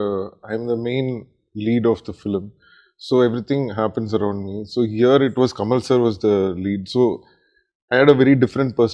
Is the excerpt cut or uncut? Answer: uncut